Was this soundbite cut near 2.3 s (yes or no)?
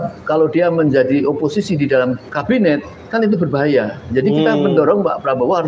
yes